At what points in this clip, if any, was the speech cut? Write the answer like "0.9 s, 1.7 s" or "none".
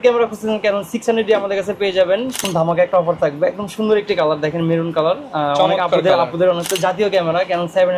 2.4 s, 6.7 s